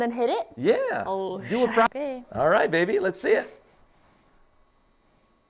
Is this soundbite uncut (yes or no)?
no